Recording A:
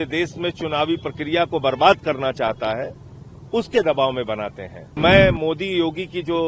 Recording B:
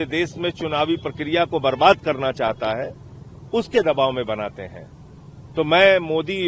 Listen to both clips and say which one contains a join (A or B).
A